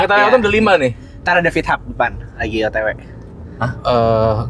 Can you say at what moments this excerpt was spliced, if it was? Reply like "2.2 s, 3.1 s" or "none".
none